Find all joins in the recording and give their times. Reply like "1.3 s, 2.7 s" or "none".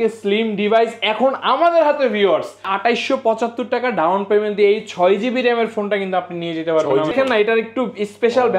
2.6 s, 7.1 s